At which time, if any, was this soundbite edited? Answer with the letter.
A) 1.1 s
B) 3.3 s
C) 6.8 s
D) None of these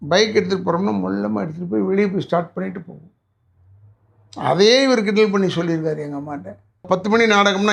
C